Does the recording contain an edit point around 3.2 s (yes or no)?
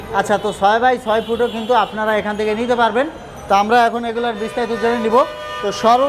no